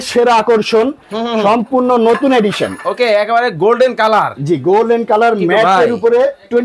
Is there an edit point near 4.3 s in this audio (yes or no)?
no